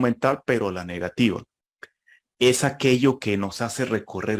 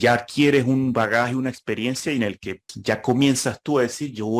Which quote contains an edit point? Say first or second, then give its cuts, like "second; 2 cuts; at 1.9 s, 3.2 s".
second; 1 cut; at 2.7 s